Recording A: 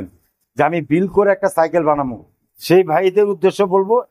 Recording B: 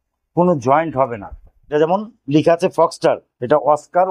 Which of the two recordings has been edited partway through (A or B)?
B